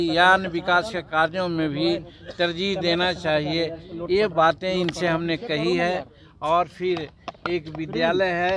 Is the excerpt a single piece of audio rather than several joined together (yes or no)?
yes